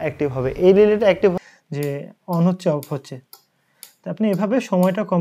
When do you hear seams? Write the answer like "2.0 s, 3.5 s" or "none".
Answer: 1.3 s

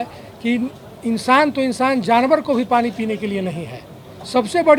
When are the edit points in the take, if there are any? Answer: none

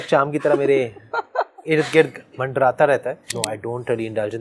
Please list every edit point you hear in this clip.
3.3 s

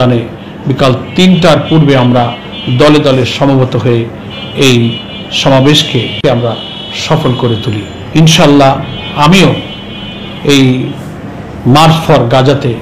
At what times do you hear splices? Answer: 6.2 s, 7.9 s

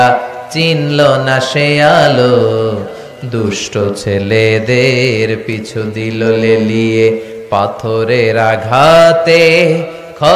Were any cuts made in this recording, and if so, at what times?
none

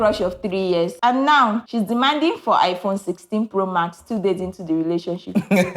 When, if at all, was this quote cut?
0.9 s, 1.7 s

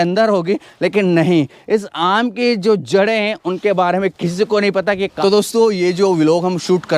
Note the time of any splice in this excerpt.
5.1 s

